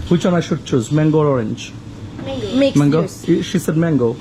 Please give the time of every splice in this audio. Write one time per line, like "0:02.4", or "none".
0:03.2